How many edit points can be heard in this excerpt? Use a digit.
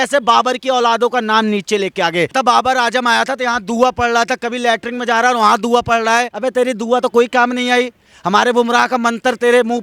2